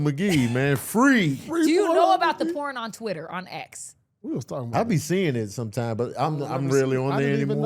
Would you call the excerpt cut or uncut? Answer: uncut